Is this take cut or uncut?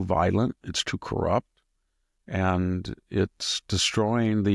uncut